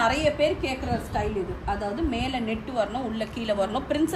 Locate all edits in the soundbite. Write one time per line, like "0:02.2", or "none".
none